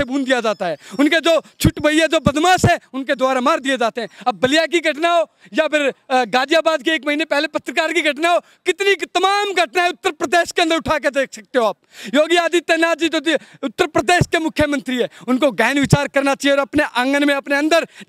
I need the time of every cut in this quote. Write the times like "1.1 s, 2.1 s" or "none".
none